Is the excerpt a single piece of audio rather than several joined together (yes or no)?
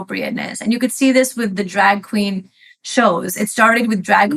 yes